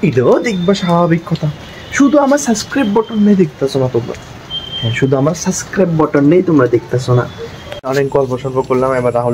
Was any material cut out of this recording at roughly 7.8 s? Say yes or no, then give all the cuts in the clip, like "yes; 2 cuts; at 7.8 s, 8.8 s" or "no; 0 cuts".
yes; 1 cut; at 7.8 s